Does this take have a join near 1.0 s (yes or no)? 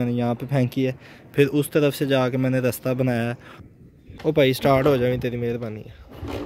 no